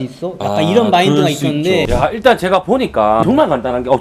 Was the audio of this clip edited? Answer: yes; 2 cuts; at 1.9 s, 3.2 s

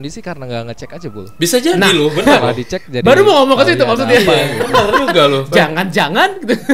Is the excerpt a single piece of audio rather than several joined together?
yes; 0 cuts

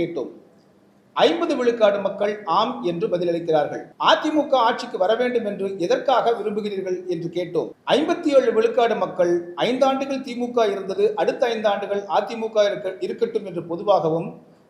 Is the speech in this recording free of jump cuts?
no; 2 cuts; at 3.8 s, 7.8 s

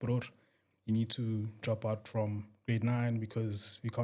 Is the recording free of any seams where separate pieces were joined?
yes; 0 cuts

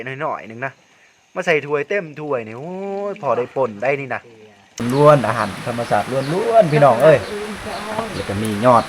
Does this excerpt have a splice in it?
yes; 1 cut; at 4.8 s

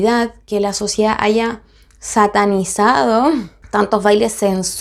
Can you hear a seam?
no; 0 cuts

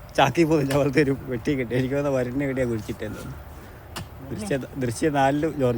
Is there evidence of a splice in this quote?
no; 0 cuts

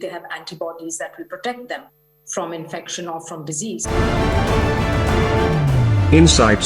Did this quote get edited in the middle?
yes; 1 cut; at 3.8 s

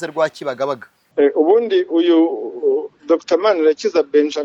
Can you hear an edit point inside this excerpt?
yes; 1 cut; at 0.9 s

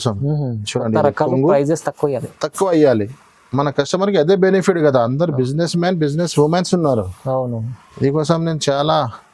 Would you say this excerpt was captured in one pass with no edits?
yes; 0 cuts

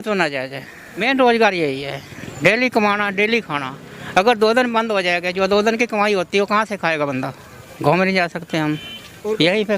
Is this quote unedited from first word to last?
no; 2 cuts; at 0.9 s, 7.6 s

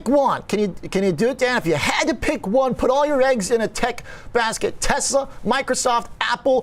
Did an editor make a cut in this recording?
no; 0 cuts

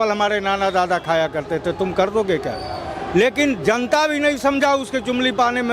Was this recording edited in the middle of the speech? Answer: no; 0 cuts

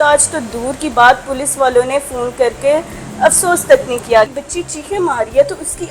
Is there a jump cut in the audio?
yes; 1 cut; at 4.3 s

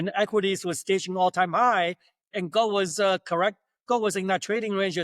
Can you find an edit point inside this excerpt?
no; 0 cuts

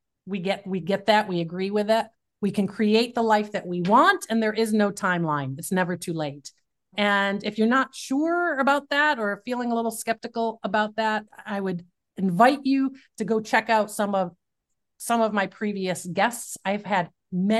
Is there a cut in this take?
yes; 2 cuts; at 6.9 s, 11.3 s

